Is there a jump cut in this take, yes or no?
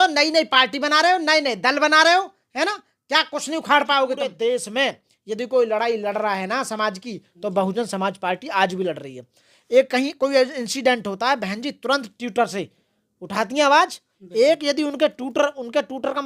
yes